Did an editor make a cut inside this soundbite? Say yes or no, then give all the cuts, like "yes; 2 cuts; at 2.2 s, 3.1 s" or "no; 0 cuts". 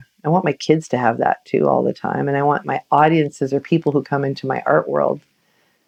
no; 0 cuts